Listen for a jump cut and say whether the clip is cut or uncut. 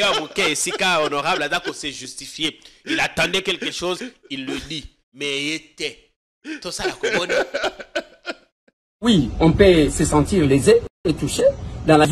uncut